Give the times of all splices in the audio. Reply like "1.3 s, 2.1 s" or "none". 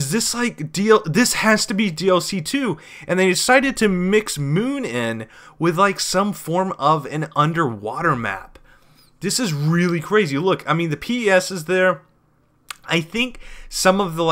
6.8 s